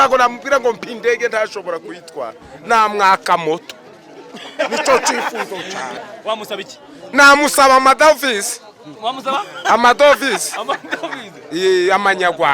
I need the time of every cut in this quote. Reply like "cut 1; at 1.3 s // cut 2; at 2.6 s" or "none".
cut 1; at 6.0 s